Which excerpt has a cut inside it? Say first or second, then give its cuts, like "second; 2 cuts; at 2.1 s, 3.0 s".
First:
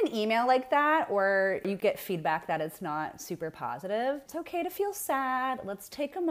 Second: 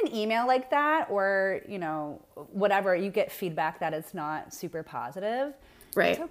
first; 2 cuts; at 1.8 s, 4.4 s